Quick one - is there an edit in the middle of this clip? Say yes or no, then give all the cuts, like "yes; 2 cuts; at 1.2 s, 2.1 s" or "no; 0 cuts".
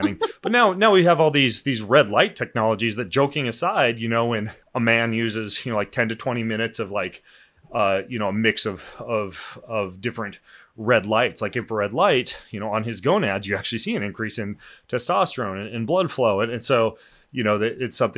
yes; 1 cut; at 4.6 s